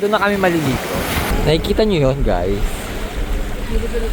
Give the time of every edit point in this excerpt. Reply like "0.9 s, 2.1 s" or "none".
1.3 s